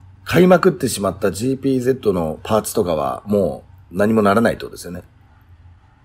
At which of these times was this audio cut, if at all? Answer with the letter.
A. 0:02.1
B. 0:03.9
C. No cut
C